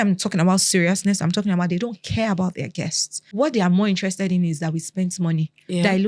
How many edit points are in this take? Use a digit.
1